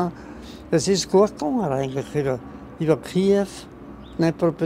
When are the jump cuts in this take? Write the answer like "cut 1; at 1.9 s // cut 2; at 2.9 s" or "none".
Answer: none